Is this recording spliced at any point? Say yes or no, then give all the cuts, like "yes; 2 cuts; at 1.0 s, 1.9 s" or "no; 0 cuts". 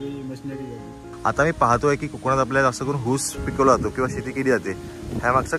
yes; 2 cuts; at 1.0 s, 3.4 s